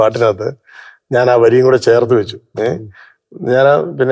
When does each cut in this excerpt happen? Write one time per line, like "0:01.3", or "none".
none